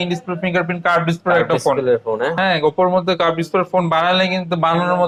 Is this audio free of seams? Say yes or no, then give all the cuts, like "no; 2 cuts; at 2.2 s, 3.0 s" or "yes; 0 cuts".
yes; 0 cuts